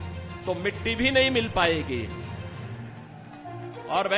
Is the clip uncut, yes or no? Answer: yes